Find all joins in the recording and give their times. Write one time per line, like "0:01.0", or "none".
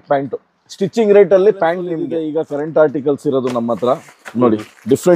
0:02.0